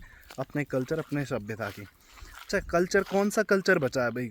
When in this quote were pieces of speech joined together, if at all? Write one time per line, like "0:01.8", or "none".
none